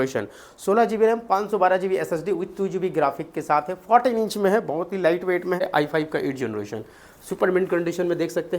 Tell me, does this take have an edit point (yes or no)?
yes